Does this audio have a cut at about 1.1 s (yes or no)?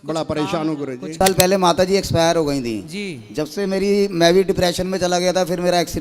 yes